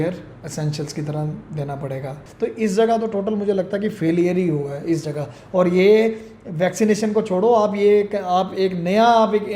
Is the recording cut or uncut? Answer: cut